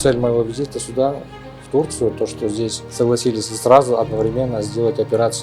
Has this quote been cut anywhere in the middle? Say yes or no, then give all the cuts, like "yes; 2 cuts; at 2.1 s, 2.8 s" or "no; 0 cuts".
no; 0 cuts